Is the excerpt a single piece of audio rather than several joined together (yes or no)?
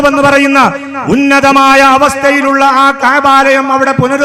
yes